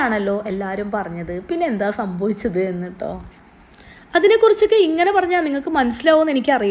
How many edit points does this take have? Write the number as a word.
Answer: zero